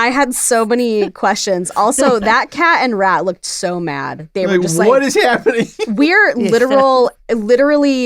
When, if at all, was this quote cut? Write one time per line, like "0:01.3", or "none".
none